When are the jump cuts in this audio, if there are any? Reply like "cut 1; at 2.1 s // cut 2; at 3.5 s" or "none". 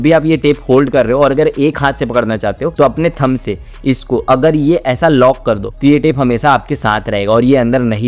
none